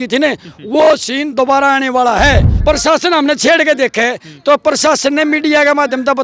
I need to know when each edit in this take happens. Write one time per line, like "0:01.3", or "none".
0:02.5